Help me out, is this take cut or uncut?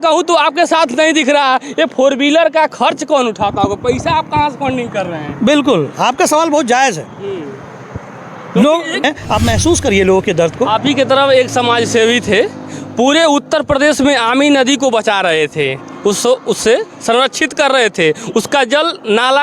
cut